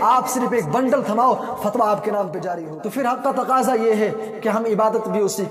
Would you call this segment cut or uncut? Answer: cut